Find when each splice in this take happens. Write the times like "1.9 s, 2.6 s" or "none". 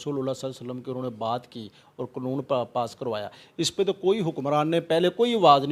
none